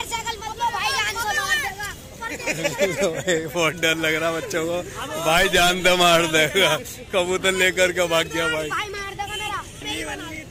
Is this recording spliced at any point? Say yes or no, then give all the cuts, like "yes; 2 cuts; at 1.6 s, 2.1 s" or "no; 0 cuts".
no; 0 cuts